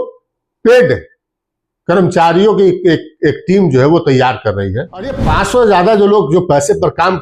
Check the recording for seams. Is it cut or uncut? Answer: cut